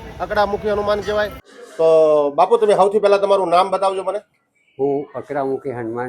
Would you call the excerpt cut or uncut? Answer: cut